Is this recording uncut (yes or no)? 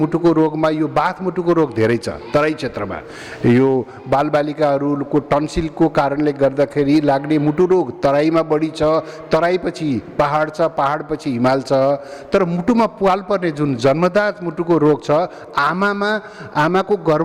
yes